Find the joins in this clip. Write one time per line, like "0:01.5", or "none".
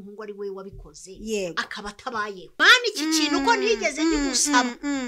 0:02.6

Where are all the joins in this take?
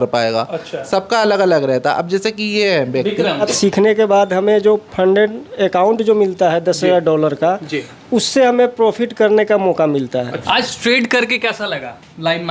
0:03.5
0:10.4

